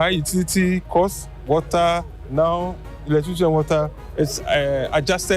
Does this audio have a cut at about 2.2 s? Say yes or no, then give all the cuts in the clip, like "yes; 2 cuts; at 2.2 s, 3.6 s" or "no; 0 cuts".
yes; 2 cuts; at 2.2 s, 4.0 s